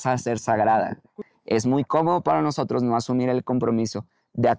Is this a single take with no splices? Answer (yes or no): no